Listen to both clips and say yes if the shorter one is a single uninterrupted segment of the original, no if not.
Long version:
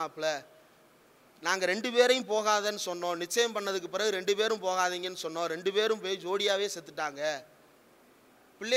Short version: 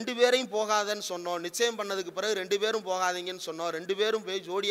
yes